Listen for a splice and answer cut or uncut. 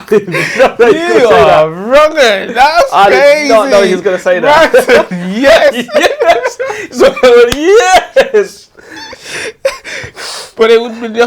uncut